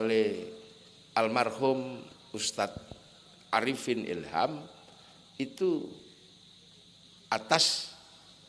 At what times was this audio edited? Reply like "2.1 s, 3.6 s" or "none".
2.1 s